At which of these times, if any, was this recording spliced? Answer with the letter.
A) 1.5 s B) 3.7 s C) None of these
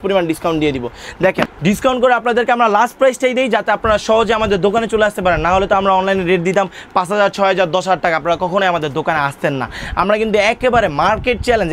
A